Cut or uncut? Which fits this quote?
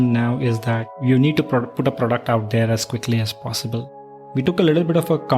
cut